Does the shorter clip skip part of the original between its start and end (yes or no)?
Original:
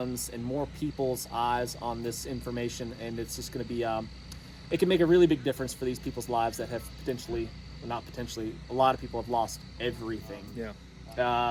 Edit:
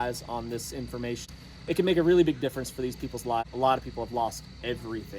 yes